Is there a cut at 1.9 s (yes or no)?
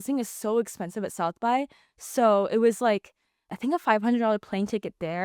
no